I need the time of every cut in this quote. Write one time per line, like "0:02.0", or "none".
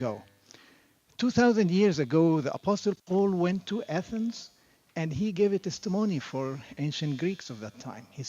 0:06.6

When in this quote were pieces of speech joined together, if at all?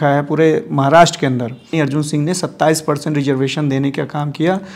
0:01.7

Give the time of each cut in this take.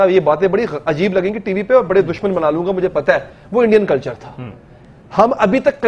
none

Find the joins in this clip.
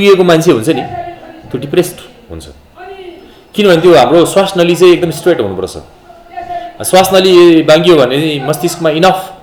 none

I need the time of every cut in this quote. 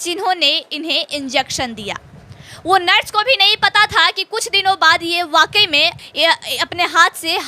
0:06.0

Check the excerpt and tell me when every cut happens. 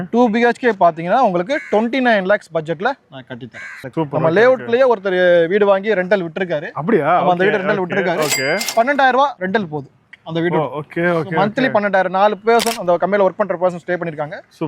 0:03.9

